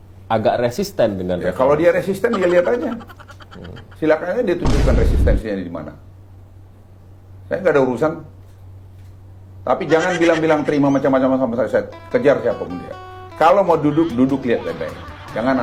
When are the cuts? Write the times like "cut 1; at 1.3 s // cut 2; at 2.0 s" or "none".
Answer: none